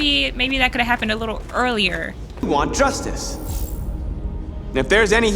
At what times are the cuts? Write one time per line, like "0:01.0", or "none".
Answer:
0:02.4